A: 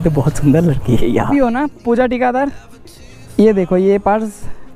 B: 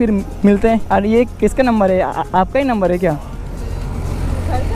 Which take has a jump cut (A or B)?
A